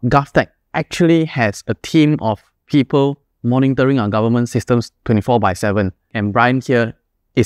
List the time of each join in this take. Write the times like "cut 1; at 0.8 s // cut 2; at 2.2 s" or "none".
cut 1; at 2.5 s // cut 2; at 6.1 s